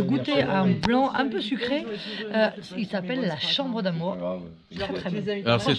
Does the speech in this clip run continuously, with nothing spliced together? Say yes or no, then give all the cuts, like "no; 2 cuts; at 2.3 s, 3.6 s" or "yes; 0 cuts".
yes; 0 cuts